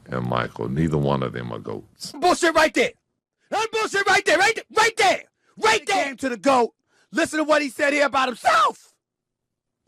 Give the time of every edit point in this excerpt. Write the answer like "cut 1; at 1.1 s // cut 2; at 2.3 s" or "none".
cut 1; at 2.2 s // cut 2; at 6.1 s